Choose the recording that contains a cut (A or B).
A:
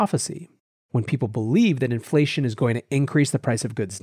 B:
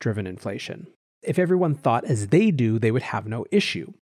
B